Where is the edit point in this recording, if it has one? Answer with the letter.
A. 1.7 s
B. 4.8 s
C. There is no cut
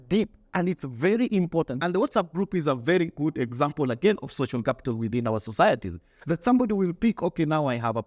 A